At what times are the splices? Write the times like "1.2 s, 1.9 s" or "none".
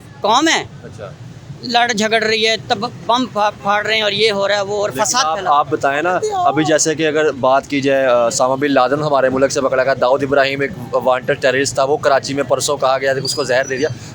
none